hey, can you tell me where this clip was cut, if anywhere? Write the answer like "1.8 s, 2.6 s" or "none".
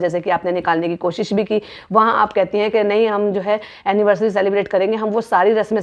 none